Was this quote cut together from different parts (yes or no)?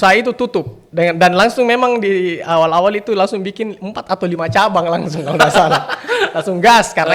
no